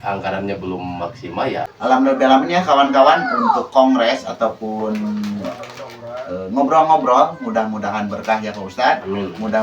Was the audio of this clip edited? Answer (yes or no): yes